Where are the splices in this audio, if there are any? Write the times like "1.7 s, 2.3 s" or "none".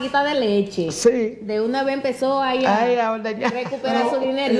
none